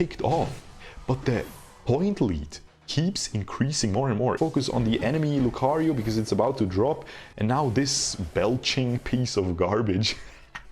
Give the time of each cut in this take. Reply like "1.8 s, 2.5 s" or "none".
4.4 s